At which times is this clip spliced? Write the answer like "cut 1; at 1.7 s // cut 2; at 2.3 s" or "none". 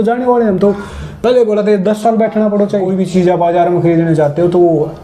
cut 1; at 2.9 s